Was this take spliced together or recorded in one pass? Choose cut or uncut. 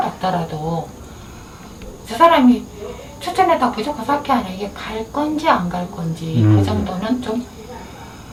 uncut